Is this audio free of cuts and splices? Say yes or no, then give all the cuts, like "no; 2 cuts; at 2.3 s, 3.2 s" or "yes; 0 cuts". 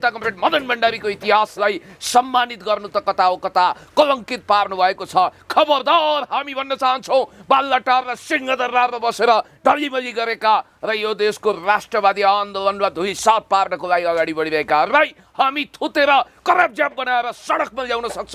yes; 0 cuts